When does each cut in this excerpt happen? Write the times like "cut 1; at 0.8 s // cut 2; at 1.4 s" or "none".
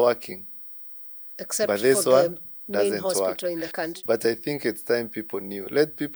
cut 1; at 3.8 s